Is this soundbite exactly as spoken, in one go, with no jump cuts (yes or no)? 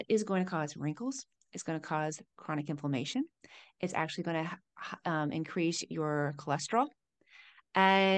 yes